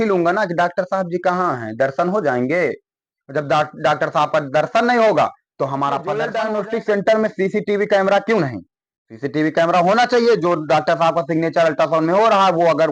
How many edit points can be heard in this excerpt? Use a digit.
1